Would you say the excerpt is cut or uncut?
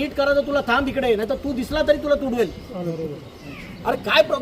cut